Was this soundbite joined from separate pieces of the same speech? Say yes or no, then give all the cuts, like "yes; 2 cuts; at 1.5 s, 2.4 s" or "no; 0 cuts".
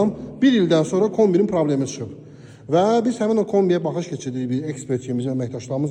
no; 0 cuts